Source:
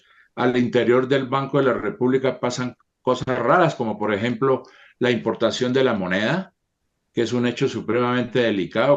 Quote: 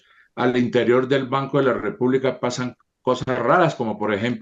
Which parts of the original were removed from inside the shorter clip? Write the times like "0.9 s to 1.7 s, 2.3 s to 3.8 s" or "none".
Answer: none